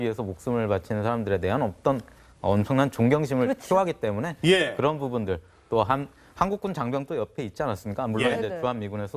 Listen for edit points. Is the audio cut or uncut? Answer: cut